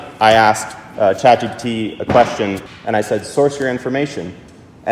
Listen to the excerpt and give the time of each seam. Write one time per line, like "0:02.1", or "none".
0:02.6